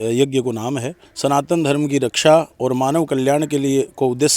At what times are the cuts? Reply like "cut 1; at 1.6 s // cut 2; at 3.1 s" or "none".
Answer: cut 1; at 1.0 s